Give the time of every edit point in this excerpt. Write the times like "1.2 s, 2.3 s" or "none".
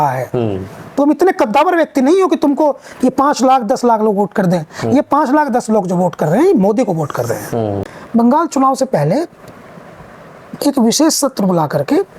7.9 s